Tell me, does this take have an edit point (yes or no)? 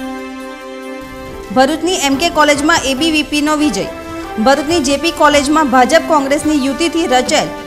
yes